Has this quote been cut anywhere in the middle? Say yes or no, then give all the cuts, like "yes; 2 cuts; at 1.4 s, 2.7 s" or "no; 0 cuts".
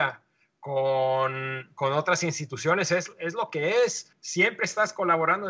yes; 1 cut; at 4.1 s